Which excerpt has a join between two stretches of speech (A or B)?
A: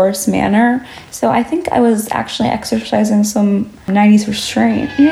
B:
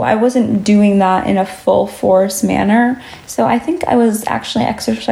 A